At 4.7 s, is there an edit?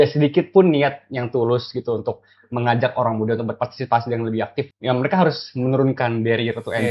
yes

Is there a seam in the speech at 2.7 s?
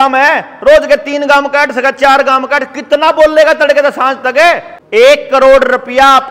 no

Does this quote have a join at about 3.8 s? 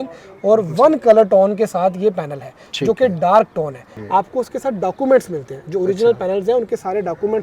yes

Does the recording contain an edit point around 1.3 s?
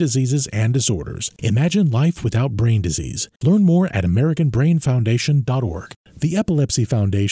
no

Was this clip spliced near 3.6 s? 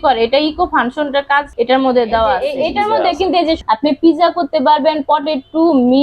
yes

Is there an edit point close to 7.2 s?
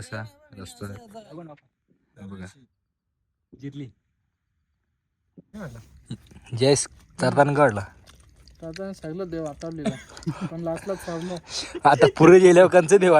no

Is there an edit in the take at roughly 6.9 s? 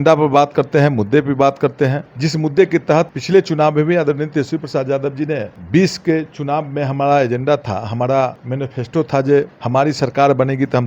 no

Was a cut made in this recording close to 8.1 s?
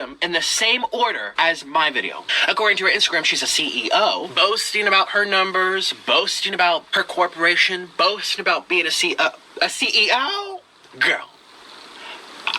no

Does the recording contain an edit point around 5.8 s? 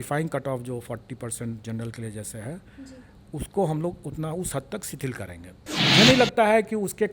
yes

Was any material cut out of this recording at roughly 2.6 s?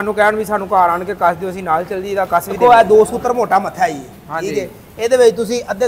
yes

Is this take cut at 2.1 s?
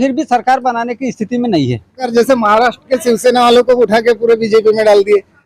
yes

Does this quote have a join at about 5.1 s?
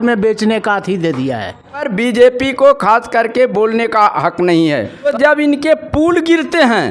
yes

